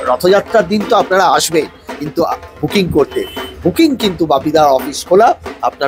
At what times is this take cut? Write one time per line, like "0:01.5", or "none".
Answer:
none